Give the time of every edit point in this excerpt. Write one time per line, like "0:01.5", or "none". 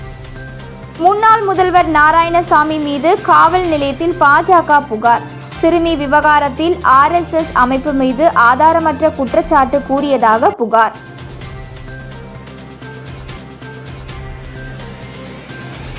0:01.0